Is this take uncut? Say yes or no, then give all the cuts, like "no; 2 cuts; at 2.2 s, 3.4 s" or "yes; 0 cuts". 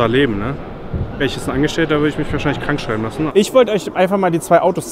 no; 2 cuts; at 1.2 s, 3.3 s